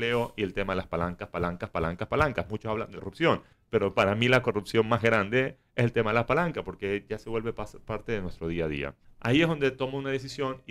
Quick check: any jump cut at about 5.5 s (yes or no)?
no